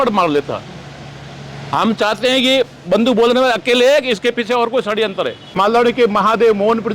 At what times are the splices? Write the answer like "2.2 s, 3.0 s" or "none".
5.5 s